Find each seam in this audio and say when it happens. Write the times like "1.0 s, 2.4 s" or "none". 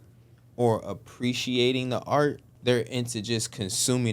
2.5 s